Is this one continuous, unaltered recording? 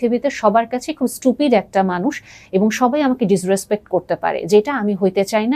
yes; 0 cuts

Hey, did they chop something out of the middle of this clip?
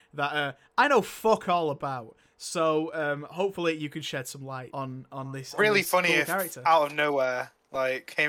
yes; 1 cut; at 4.6 s

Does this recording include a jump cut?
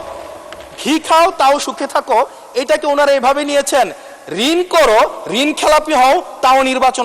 no; 0 cuts

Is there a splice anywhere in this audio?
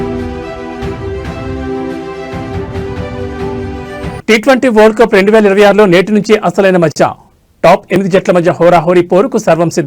yes; 1 cut; at 4.2 s

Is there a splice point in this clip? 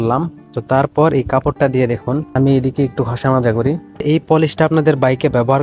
yes; 1 cut; at 4.0 s

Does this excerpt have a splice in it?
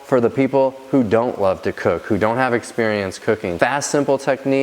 yes; 1 cut; at 3.5 s

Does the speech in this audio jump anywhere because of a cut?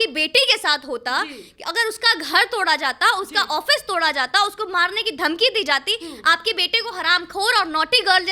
no; 0 cuts

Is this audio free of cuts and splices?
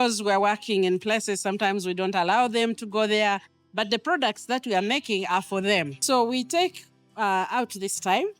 no; 1 cut; at 5.9 s

